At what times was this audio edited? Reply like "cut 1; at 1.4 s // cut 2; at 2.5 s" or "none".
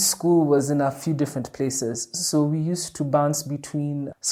none